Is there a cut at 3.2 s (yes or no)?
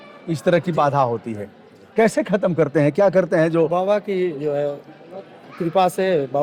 no